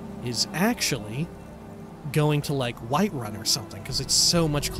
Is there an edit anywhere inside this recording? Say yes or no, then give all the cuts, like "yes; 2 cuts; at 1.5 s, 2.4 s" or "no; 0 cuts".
yes; 1 cut; at 1.4 s